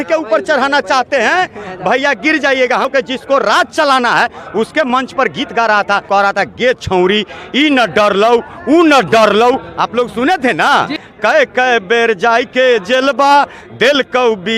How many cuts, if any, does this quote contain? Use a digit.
3